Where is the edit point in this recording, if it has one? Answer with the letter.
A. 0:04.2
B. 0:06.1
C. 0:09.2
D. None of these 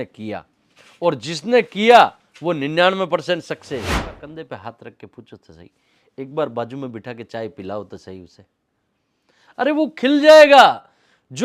A